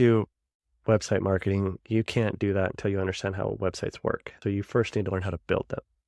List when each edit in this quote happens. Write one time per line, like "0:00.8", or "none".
0:04.3